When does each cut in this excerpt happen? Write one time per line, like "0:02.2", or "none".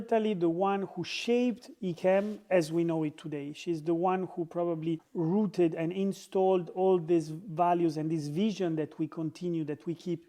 none